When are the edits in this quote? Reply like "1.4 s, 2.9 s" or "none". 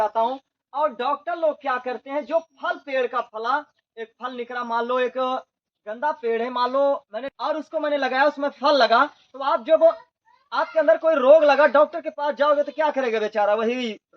7.2 s